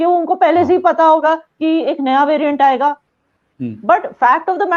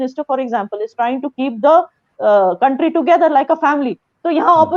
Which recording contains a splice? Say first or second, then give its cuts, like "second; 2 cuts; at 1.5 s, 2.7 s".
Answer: first; 1 cut; at 3.1 s